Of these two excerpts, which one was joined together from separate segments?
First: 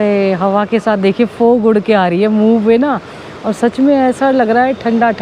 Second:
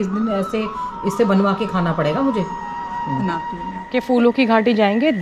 second; 1 cut; at 3.7 s

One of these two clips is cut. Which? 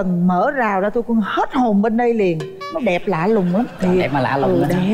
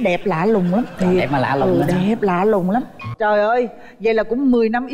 second; 1 cut; at 3.0 s

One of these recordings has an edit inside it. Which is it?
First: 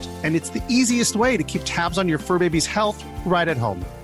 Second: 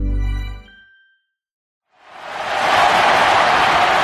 second; 1 cut; at 1.7 s

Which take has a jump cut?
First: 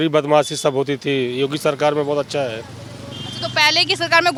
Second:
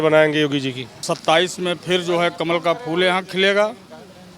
second; 1 cut; at 1.0 s

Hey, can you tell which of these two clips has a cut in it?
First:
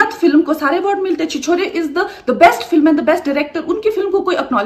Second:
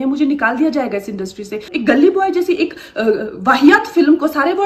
second; 1 cut; at 1.6 s

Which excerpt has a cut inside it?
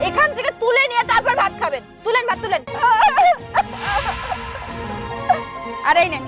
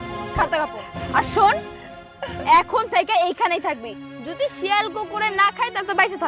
first; 1 cut; at 2.7 s

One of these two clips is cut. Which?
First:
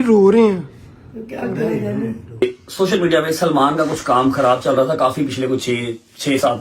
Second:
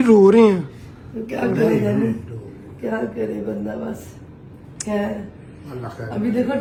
first; 1 cut; at 2.4 s

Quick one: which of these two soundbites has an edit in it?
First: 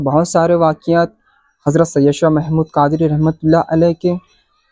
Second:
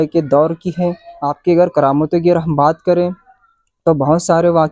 second; 1 cut; at 1.1 s

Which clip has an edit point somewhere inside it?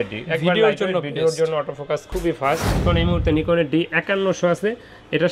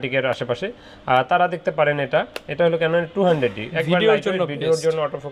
first; 1 cut; at 2.8 s

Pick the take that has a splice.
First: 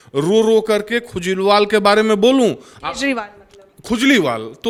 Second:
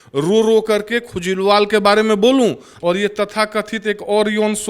second; 1 cut; at 2.7 s

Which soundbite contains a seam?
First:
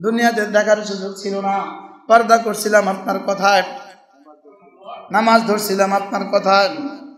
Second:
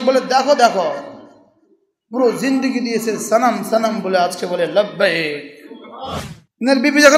second; 1 cut; at 6.2 s

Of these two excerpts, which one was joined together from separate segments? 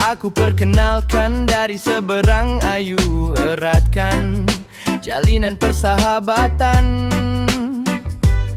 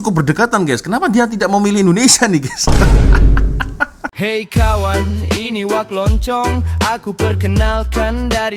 second; 1 cut; at 4.0 s

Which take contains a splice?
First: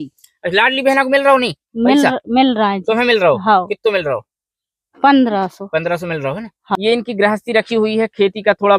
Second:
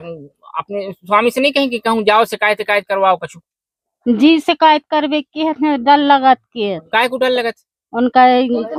first; 1 cut; at 6.8 s

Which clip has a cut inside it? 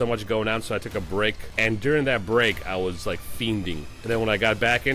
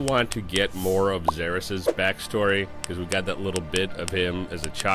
first; 2 cuts; at 1.5 s, 3.9 s

